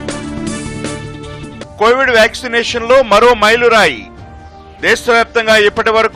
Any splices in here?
no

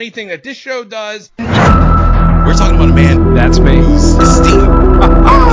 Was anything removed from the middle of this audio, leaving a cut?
yes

